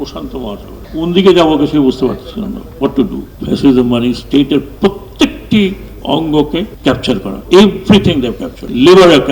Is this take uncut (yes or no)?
no